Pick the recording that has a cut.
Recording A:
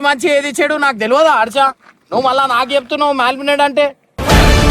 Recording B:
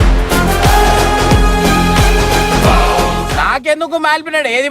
B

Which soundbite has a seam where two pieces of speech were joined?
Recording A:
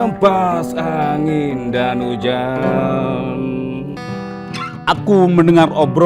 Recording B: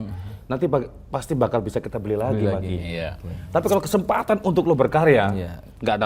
A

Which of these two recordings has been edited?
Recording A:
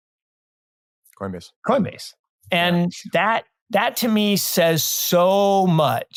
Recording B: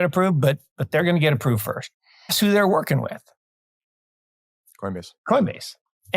B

